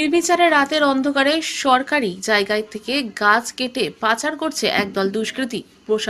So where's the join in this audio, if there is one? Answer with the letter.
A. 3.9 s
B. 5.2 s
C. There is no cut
C